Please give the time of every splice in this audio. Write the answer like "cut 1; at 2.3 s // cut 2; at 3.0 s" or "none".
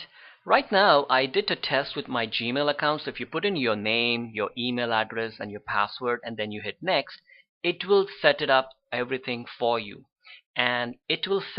cut 1; at 3.0 s